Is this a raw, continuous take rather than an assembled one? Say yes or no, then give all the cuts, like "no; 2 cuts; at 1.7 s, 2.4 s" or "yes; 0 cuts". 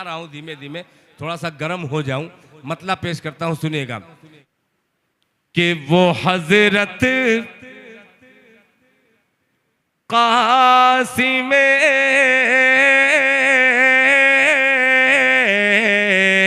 no; 1 cut; at 4.4 s